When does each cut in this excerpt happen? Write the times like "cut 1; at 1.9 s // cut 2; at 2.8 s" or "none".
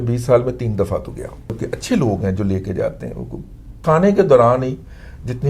cut 1; at 1.6 s // cut 2; at 3.8 s

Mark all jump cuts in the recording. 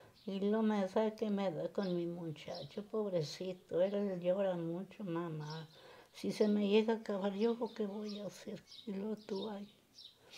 cut 1; at 8.6 s

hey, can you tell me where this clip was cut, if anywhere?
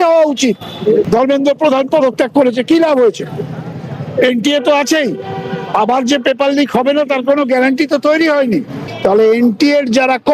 cut 1; at 1.1 s // cut 2; at 8.8 s

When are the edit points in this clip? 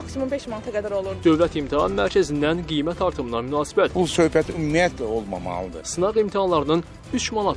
cut 1; at 1.1 s // cut 2; at 3.9 s // cut 3; at 5.7 s

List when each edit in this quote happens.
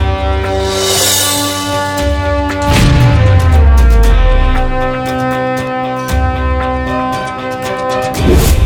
none

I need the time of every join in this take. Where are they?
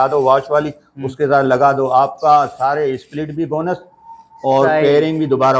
none

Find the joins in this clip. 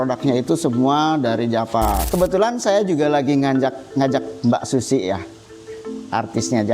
cut 1; at 2.0 s

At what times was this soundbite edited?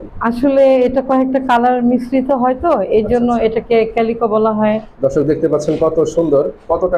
cut 1; at 4.9 s

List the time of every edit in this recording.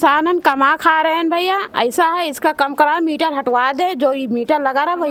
none

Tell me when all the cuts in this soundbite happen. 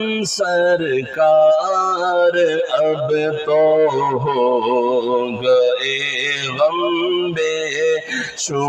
none

